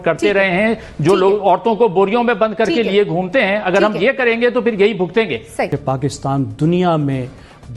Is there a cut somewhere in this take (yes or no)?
yes